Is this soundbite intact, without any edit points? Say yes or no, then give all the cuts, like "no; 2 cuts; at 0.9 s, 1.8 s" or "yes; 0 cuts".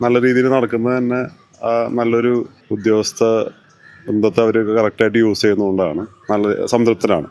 yes; 0 cuts